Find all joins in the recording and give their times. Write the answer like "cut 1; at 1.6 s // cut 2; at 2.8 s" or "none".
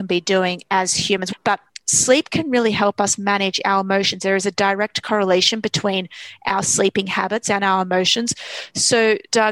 cut 1; at 1.2 s